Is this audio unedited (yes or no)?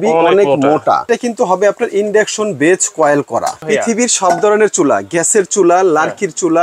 no